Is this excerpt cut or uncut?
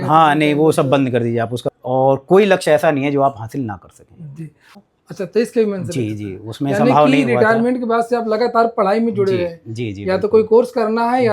cut